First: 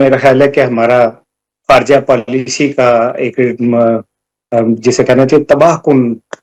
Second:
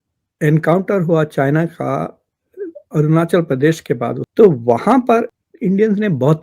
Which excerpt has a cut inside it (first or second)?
second